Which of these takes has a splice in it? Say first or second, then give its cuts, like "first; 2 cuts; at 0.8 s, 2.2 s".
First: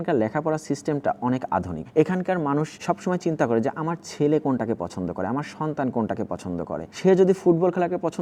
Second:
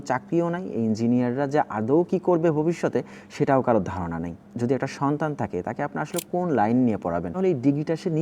second; 2 cuts; at 4.4 s, 7.3 s